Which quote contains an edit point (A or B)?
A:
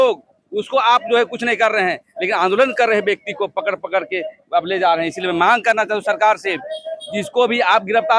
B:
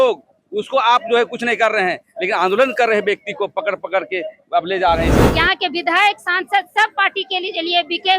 B